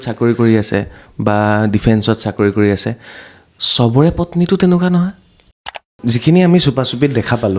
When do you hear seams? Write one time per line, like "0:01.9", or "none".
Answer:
0:05.8